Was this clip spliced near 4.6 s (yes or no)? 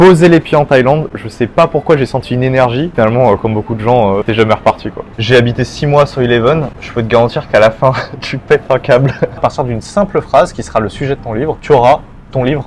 yes